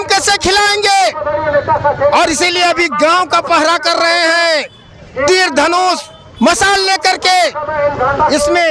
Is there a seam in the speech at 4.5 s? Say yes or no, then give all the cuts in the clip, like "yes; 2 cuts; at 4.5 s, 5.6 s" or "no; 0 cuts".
no; 0 cuts